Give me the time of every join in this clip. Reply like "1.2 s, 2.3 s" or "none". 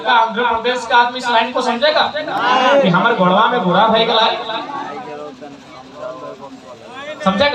none

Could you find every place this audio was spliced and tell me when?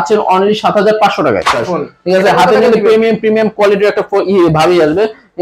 1.6 s

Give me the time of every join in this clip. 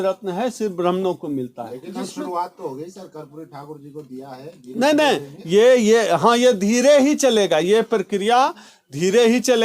none

